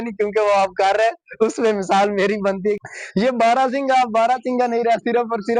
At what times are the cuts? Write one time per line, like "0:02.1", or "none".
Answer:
0:02.8